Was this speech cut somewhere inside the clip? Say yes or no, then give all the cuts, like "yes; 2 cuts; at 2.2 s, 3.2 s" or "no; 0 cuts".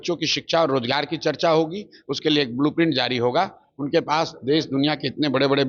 no; 0 cuts